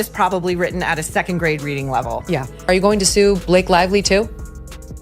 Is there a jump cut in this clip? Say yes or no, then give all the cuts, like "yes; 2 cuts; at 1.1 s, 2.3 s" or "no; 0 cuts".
yes; 1 cut; at 2.5 s